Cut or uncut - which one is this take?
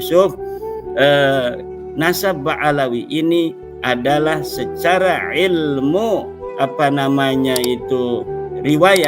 uncut